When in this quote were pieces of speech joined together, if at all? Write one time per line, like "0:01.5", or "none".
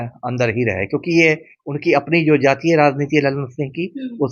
none